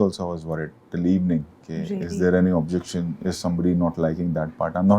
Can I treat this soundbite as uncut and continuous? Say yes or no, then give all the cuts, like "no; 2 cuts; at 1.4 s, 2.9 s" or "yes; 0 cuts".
yes; 0 cuts